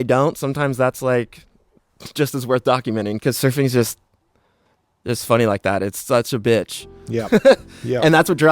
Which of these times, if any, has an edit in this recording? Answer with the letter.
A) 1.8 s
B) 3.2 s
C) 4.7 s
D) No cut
B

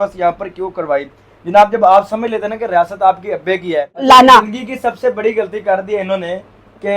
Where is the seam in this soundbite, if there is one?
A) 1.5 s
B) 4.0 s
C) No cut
B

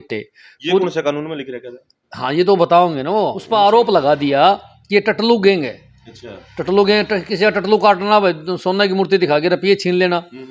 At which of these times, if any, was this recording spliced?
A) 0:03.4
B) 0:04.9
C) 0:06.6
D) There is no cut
A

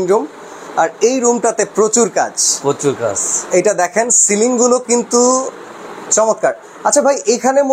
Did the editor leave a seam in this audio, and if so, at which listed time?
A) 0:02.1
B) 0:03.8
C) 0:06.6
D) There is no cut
D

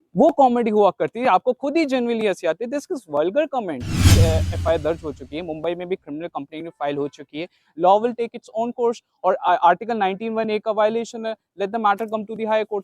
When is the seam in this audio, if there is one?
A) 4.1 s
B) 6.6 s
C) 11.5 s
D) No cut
A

